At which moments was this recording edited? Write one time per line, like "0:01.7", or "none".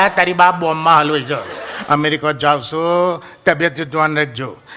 0:01.7